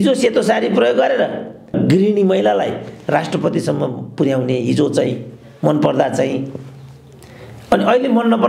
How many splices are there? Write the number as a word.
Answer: one